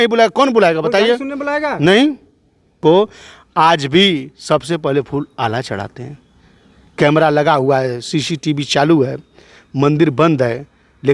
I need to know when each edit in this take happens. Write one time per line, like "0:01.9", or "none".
0:02.7